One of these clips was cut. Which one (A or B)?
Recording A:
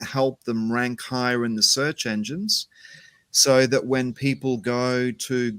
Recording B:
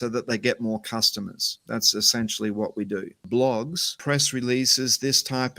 B